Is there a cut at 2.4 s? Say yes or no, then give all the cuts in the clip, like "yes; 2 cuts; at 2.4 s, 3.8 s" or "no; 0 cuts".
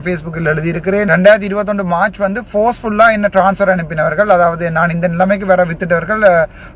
no; 1 cut; at 1.1 s